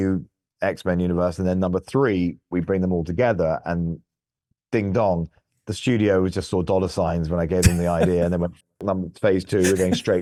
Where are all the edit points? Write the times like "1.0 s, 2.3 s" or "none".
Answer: none